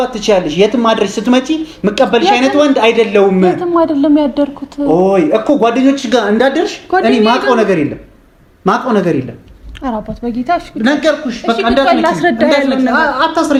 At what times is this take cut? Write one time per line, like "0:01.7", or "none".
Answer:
none